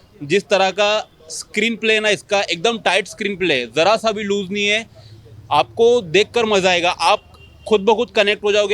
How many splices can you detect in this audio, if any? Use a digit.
0